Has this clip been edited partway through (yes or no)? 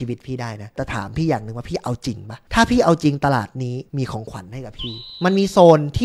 yes